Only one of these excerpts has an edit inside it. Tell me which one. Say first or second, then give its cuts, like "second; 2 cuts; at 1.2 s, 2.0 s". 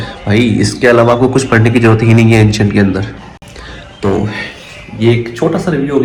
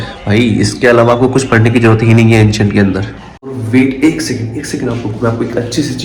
second; 1 cut; at 3.6 s